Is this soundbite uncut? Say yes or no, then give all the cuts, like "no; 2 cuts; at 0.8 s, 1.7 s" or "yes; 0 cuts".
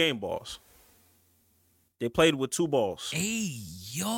no; 1 cut; at 3.1 s